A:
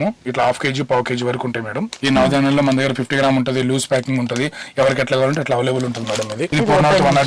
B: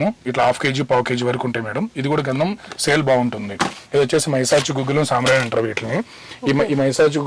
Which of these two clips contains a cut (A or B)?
A